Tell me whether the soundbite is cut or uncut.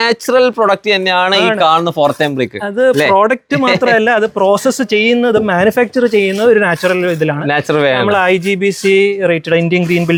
uncut